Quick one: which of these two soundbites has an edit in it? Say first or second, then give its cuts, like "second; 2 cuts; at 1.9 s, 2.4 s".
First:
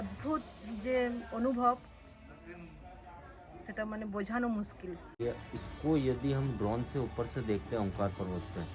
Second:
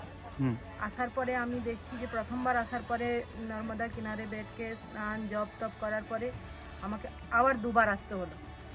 first; 1 cut; at 5.2 s